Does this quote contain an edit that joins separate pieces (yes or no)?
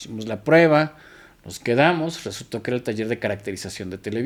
no